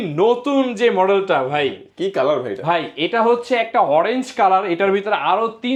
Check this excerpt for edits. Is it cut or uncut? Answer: uncut